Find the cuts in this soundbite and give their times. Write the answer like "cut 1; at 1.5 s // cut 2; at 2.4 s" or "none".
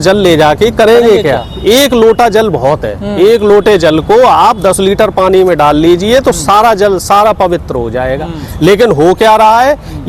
none